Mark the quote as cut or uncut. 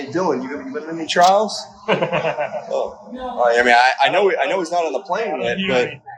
uncut